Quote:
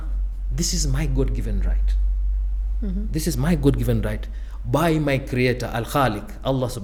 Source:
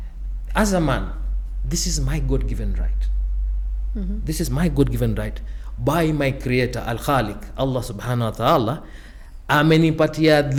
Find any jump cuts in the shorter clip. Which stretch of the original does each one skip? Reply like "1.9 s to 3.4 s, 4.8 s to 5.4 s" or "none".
none